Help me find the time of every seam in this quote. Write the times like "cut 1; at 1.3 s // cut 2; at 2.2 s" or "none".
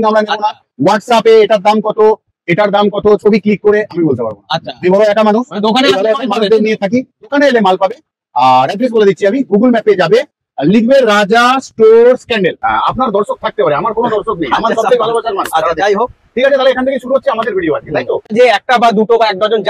cut 1; at 12.6 s // cut 2; at 18.2 s